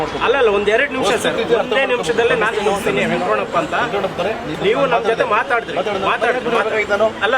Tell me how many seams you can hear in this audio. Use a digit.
0